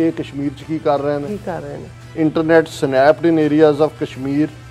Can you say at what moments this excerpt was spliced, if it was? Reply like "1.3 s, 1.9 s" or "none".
1.8 s